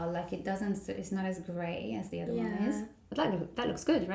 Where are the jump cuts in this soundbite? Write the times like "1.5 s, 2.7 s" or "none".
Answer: 3.0 s